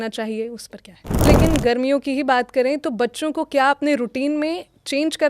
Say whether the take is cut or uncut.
cut